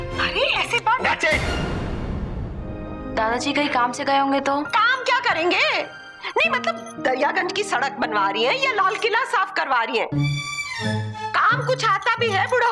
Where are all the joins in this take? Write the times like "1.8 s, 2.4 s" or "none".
2.9 s